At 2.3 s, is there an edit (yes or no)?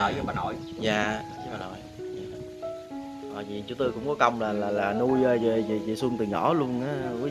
no